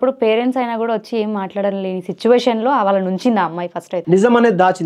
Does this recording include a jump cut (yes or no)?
yes